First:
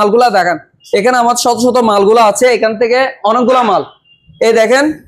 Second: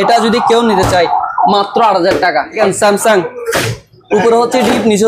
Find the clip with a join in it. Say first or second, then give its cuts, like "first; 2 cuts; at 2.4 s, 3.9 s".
second; 1 cut; at 2.6 s